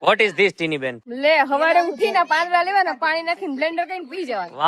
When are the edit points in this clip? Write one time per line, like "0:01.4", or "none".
0:01.0